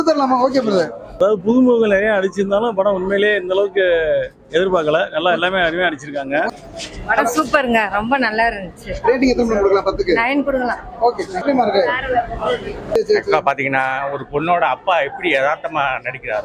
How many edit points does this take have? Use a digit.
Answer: 4